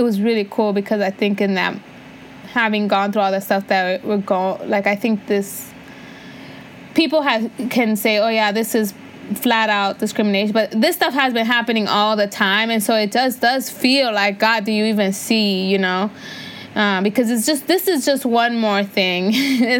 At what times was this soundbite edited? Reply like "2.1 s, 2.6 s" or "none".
none